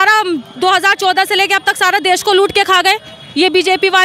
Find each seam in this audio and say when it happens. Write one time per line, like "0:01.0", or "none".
none